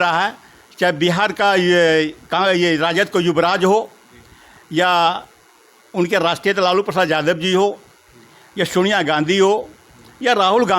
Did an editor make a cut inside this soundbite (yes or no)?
no